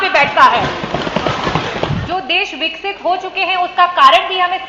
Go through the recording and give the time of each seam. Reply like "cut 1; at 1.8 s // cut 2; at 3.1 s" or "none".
cut 1; at 2.0 s